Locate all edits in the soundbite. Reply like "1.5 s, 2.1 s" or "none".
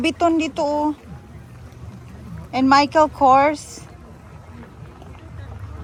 none